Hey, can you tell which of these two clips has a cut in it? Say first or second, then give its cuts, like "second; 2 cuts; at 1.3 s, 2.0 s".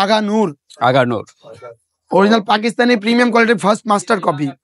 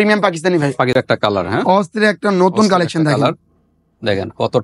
second; 1 cut; at 0.9 s